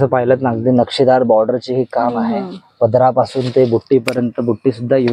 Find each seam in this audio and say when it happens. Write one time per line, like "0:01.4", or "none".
none